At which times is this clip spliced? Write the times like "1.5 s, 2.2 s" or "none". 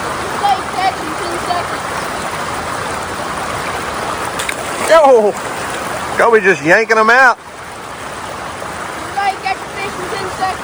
none